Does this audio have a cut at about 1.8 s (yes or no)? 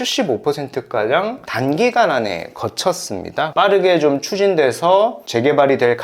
no